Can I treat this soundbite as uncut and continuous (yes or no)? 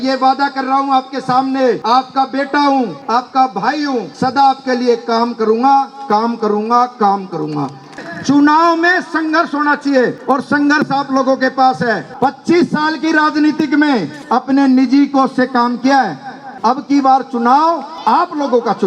no